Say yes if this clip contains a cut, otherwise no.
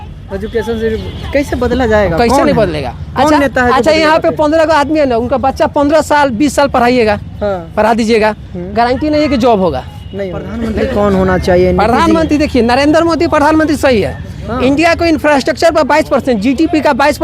yes